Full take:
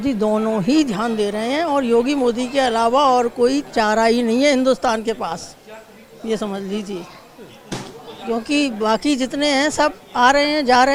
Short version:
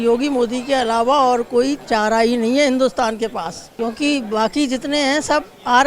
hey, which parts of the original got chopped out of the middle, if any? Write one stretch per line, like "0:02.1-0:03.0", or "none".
0:05.5-0:08.1